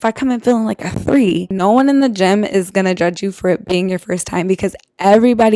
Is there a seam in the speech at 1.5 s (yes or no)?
yes